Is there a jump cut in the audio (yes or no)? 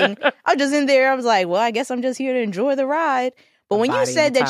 no